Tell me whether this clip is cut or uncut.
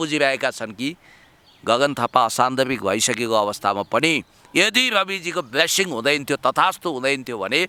uncut